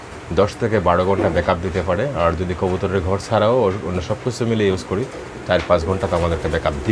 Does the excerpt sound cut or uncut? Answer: uncut